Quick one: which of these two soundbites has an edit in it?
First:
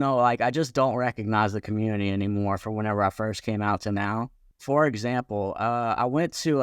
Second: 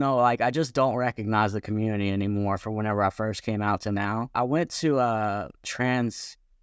second; 1 cut; at 4.3 s

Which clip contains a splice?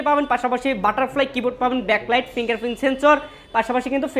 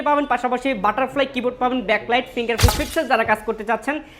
second; 1 cut; at 2.7 s

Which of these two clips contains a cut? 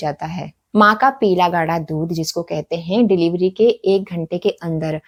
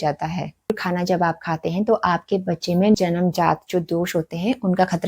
second; 2 cuts; at 0.7 s, 2.9 s

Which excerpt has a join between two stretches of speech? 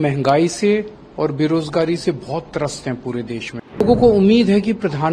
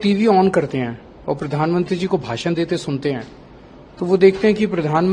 first; 1 cut; at 3.8 s

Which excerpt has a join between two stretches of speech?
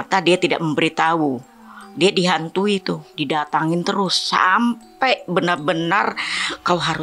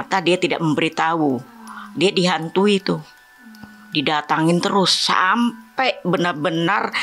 first; 1 cut; at 3.1 s

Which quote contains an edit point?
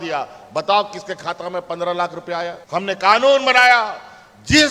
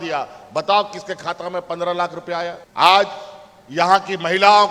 first; 1 cut; at 2.6 s

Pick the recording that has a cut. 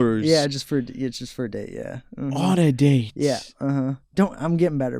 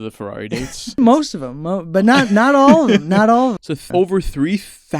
second; 2 cuts; at 1.0 s, 3.7 s

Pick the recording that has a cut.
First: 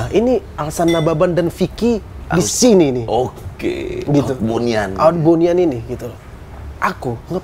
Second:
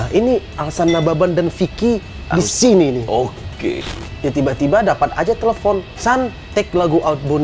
second; 2 cuts; at 3.9 s, 5.9 s

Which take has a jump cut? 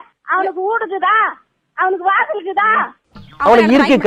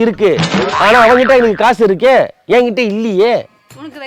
first; 1 cut; at 3.1 s

